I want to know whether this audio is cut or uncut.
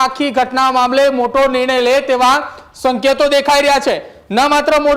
uncut